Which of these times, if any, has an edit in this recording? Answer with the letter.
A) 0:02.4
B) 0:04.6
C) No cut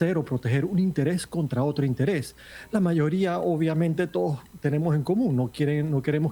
C